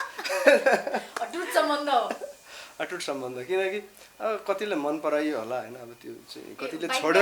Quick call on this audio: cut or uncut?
uncut